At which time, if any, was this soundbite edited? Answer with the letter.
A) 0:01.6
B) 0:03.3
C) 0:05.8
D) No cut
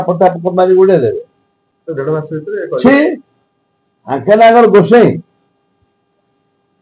D